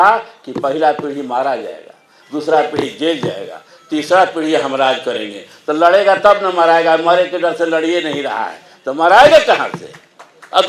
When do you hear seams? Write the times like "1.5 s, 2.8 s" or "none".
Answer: none